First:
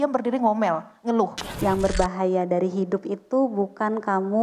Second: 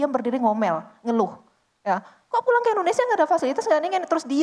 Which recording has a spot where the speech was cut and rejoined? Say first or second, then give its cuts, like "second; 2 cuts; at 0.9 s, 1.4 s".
first; 1 cut; at 1.5 s